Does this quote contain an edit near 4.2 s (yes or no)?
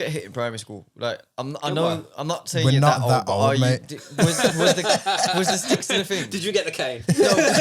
no